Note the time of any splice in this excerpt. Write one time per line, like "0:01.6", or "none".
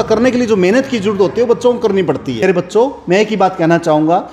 0:02.4